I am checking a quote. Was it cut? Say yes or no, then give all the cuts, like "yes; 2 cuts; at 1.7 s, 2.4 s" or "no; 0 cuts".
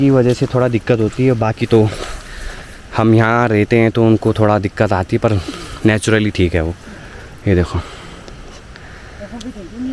no; 0 cuts